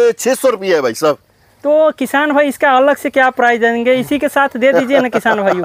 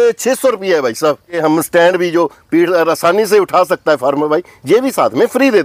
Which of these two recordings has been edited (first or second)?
second